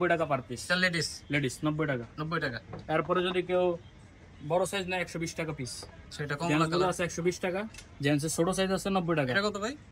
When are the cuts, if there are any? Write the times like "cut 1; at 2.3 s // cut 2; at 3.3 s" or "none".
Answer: none